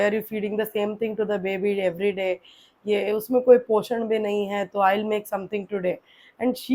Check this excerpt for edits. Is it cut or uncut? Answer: uncut